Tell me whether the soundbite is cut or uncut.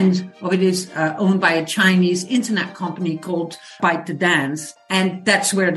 cut